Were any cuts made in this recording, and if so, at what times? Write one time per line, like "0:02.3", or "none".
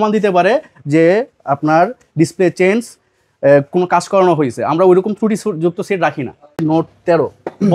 0:06.6